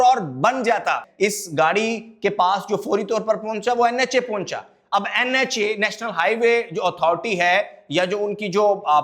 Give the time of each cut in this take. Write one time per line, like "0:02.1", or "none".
0:01.1